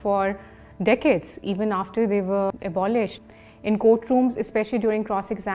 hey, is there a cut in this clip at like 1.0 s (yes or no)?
no